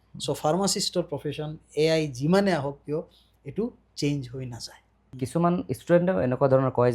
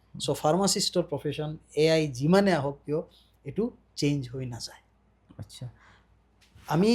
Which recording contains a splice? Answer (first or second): first